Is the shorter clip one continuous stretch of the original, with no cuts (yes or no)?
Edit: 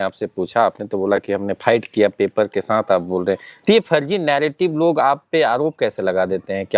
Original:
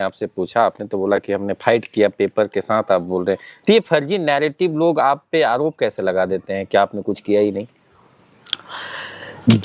yes